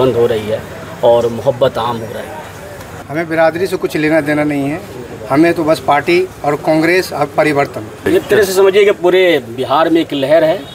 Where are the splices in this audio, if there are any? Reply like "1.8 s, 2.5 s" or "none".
2.9 s, 7.9 s